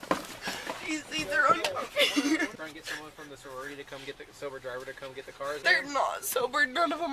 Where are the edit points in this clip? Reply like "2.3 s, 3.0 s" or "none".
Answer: 2.5 s, 5.6 s